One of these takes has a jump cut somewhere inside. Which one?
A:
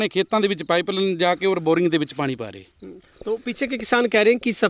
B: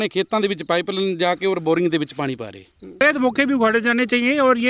B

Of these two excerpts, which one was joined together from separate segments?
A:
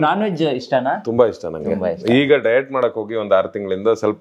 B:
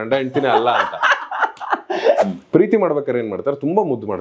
B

